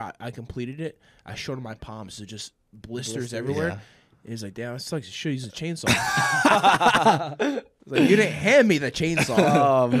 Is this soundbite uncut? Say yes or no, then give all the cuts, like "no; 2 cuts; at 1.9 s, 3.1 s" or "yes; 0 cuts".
yes; 0 cuts